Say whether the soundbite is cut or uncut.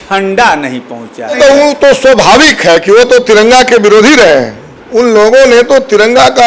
cut